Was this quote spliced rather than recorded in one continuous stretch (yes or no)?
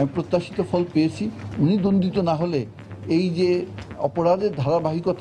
yes